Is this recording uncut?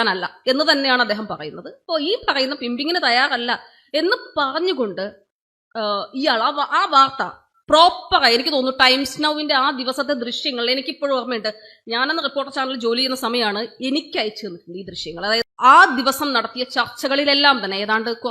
no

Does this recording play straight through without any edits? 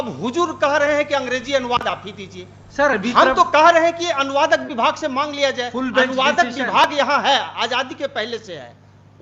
yes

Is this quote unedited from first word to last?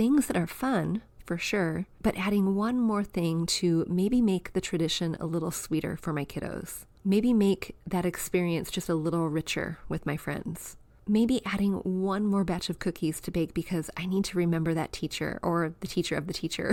yes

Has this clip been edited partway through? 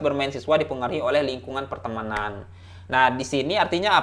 no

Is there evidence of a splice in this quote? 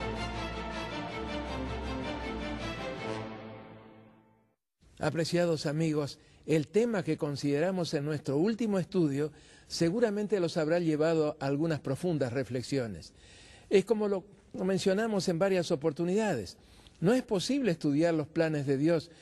no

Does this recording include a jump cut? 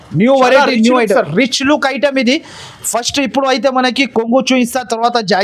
no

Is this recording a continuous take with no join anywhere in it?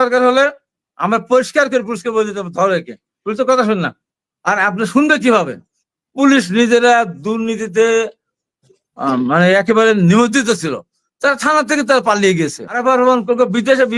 no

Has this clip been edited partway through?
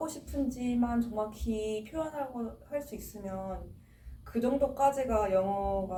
no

